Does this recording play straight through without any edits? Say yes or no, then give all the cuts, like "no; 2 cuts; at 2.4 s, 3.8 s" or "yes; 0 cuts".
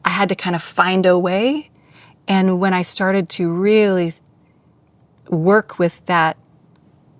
yes; 0 cuts